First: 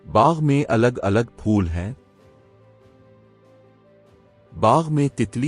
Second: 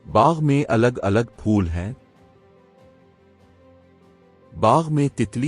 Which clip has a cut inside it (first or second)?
second